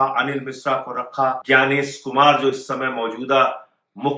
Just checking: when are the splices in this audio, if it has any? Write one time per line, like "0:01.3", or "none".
0:01.4